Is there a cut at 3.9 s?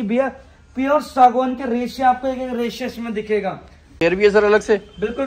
yes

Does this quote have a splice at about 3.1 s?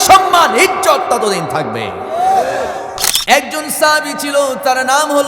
yes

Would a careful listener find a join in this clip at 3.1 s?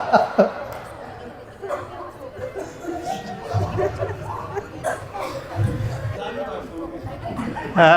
no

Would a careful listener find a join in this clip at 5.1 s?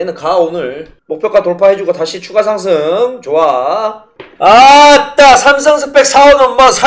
no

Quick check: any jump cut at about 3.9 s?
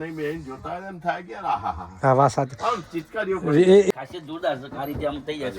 yes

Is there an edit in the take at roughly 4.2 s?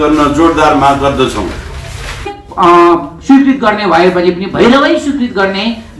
no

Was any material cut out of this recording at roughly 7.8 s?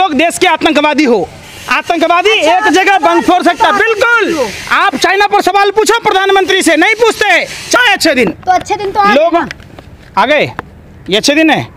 yes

